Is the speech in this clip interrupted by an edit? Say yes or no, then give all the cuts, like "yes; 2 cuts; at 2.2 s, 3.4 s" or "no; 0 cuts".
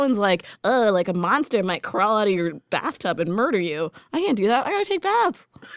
no; 0 cuts